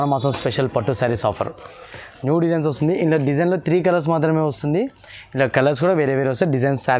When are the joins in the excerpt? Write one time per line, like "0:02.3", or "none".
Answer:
none